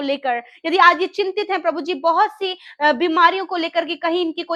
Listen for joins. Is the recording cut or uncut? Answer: uncut